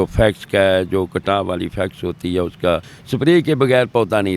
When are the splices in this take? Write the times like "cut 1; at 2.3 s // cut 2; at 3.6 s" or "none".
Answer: cut 1; at 2.9 s

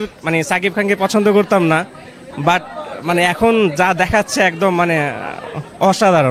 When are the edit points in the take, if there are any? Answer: none

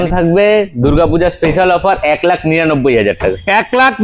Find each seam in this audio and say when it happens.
none

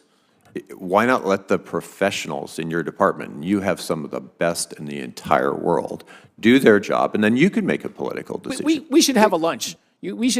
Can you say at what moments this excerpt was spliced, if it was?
cut 1; at 8.5 s

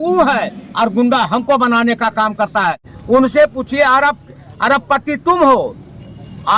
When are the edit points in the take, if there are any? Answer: cut 1; at 2.9 s

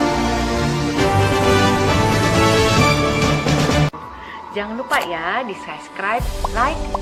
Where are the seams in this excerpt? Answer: none

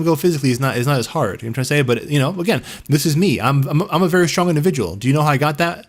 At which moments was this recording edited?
none

